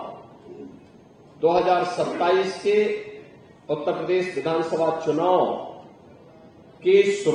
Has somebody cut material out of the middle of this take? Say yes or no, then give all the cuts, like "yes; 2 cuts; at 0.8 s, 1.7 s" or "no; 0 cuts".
no; 0 cuts